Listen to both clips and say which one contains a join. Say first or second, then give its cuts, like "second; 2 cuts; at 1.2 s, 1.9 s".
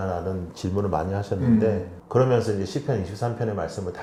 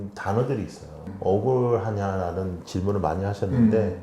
second; 1 cut; at 1.0 s